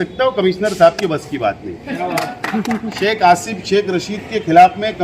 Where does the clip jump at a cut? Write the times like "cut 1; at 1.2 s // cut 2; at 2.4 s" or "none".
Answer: cut 1; at 2.8 s